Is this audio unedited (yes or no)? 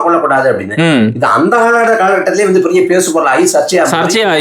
yes